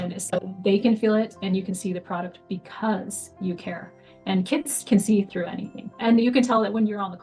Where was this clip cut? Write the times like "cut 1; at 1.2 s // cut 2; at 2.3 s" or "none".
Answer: cut 1; at 5.9 s